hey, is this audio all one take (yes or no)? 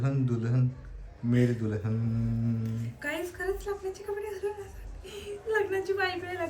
yes